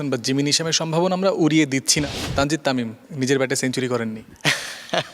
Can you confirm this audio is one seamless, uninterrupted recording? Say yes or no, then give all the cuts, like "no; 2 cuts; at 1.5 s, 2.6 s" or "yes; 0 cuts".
no; 3 cuts; at 2.0 s, 3.0 s, 4.3 s